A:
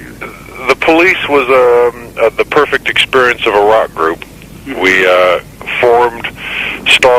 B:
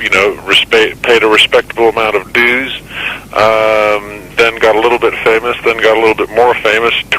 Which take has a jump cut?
B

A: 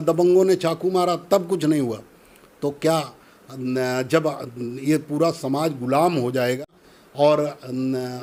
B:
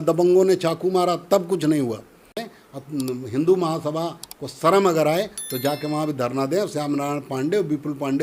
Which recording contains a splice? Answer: B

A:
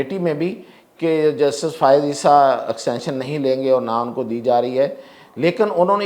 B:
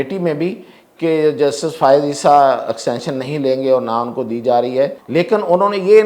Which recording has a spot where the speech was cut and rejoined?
B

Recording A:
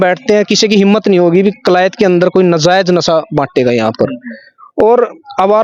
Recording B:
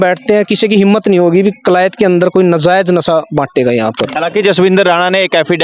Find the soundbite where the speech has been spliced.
B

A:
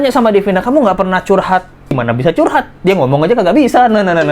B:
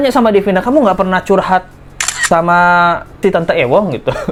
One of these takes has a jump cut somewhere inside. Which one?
A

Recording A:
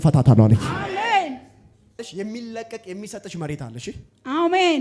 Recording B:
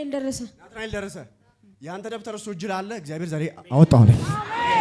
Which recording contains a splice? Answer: A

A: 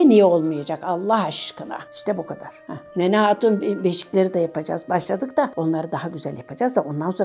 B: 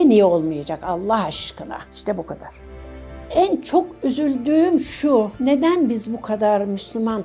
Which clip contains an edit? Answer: B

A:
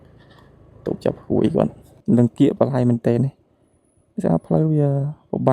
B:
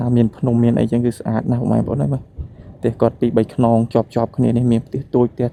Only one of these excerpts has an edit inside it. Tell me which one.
A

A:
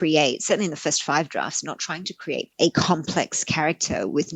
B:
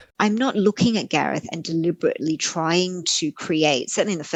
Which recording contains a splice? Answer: A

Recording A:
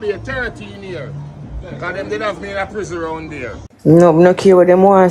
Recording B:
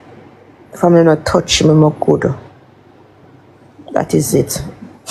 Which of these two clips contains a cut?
A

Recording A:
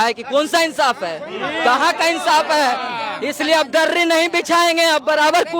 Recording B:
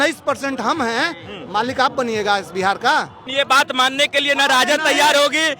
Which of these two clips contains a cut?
B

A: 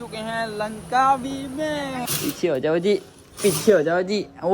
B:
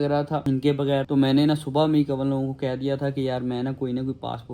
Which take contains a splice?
A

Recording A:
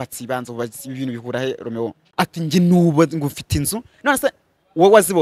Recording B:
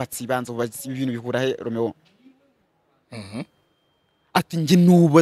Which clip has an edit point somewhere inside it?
A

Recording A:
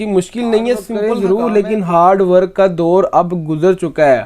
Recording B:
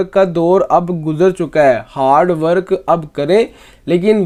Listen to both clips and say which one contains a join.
A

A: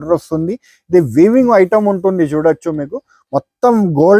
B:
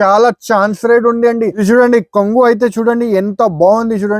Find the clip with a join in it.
B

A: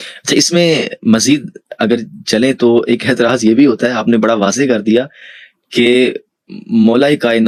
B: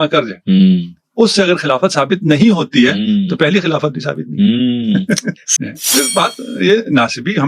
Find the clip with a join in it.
B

